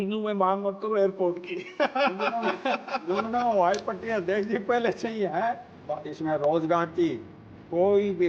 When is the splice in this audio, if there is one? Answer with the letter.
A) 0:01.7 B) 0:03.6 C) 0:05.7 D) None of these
C